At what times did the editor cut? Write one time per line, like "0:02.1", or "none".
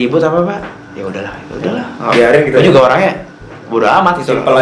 none